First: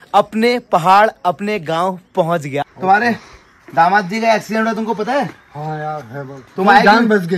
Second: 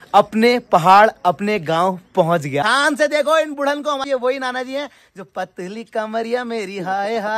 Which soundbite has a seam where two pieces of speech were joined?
second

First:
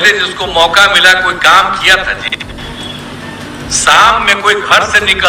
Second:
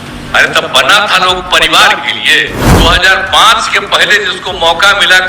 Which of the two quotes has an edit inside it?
second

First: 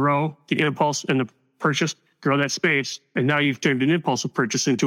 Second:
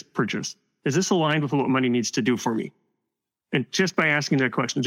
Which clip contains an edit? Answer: first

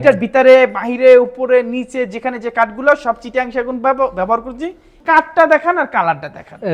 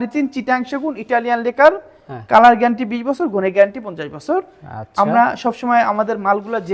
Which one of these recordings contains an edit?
first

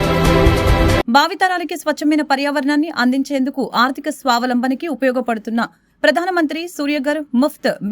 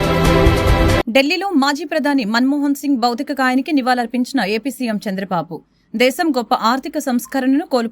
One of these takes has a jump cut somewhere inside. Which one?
second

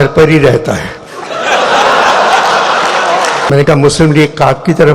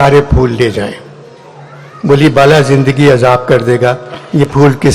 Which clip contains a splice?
first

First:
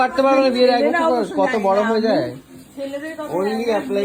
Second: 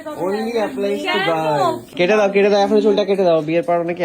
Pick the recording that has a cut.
second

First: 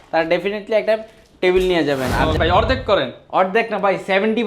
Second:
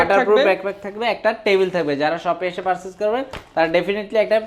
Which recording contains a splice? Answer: first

